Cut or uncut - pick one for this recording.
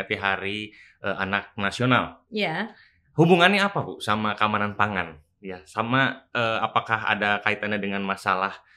uncut